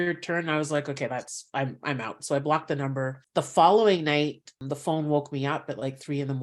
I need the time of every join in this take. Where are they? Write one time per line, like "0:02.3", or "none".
0:03.2
0:04.6